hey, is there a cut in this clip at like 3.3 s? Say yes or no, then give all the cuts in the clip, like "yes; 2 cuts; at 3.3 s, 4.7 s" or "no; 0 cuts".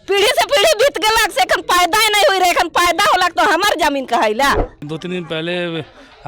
no; 1 cut; at 4.9 s